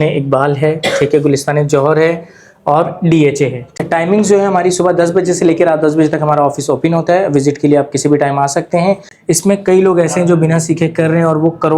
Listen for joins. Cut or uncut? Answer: cut